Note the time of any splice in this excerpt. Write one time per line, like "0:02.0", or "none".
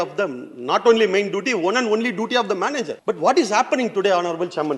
0:02.9